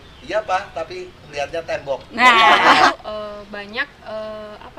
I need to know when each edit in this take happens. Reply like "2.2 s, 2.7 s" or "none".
2.9 s